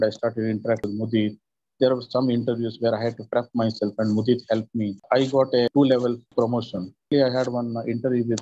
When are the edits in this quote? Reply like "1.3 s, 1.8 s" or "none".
5.0 s, 7.1 s